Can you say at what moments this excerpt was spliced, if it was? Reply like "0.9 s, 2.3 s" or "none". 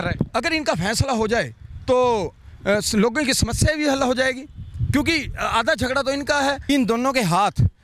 6.6 s